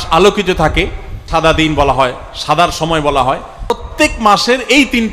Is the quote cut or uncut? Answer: cut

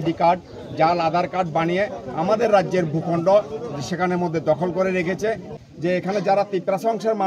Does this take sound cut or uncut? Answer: cut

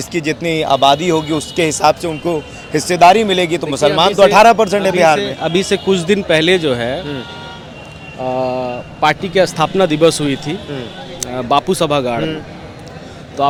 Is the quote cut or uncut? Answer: uncut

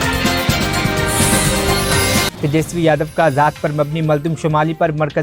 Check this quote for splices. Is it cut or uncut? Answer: uncut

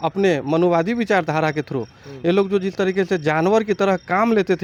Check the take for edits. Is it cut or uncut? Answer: uncut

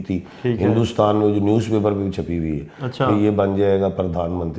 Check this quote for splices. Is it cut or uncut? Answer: uncut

